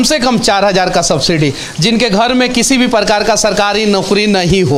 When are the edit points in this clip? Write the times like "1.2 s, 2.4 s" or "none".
none

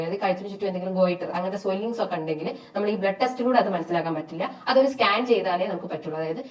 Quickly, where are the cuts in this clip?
none

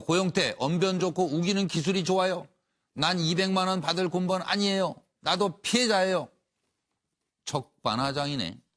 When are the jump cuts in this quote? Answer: 5.1 s

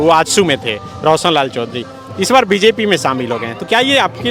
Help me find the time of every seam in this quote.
none

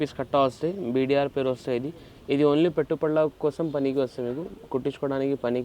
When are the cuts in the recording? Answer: none

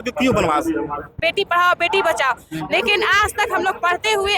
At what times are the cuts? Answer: 1.1 s

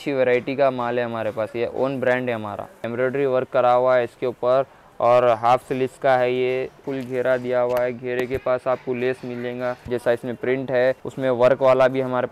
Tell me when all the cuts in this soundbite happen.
2.8 s, 6.8 s, 9.9 s, 11.1 s

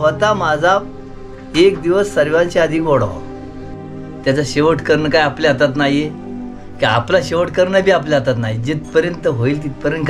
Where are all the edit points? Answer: 3.6 s

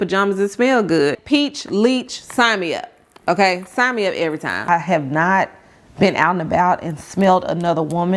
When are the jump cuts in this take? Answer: 1.2 s, 4.7 s

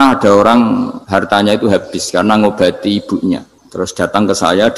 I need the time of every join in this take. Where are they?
1.0 s, 3.6 s

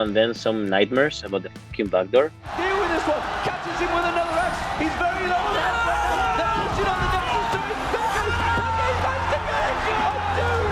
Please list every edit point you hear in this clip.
2.5 s

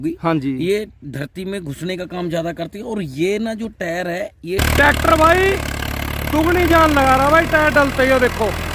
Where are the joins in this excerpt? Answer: 4.6 s

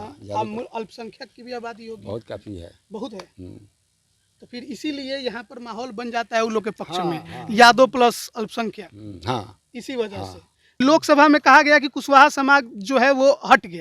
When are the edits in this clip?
10.8 s

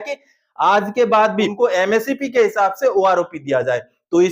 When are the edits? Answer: 1.5 s

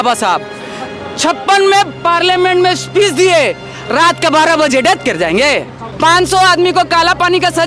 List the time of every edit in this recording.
5.8 s

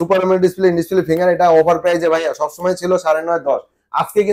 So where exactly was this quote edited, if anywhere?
none

